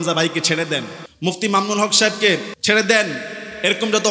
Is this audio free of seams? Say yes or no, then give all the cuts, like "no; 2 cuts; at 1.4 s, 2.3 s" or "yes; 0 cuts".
no; 2 cuts; at 1.0 s, 2.5 s